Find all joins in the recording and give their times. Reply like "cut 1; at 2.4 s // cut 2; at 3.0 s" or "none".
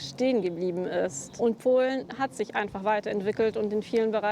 cut 1; at 1.2 s